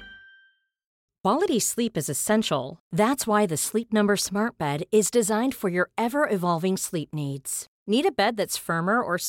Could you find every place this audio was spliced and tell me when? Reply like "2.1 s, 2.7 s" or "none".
0.9 s